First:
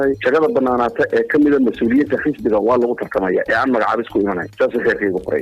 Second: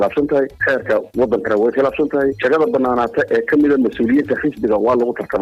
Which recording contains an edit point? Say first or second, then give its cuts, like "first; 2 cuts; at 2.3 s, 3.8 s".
first; 1 cut; at 4.5 s